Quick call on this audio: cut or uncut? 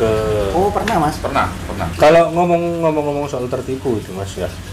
cut